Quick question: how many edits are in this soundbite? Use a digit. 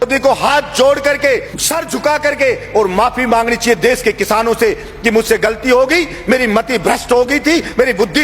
1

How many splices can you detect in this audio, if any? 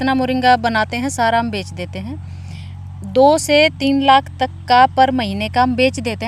0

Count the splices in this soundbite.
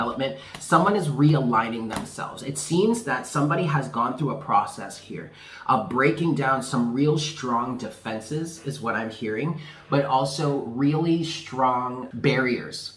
1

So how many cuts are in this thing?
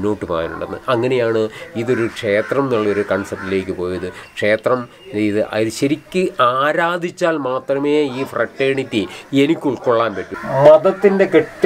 1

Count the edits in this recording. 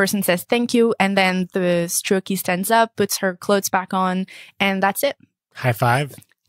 1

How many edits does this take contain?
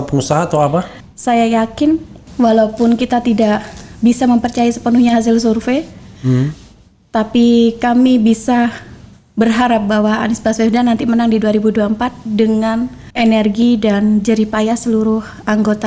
1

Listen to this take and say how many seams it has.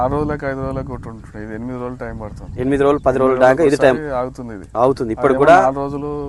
0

